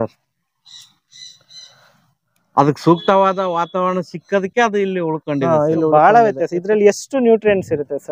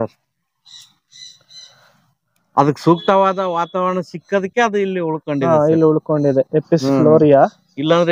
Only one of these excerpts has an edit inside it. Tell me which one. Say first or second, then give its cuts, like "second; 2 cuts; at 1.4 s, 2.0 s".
first; 1 cut; at 5.9 s